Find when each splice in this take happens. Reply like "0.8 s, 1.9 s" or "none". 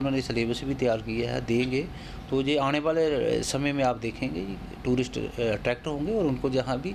none